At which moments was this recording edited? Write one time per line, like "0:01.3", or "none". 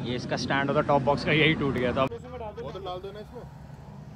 0:02.1